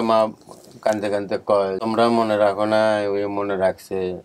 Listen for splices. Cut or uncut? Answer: cut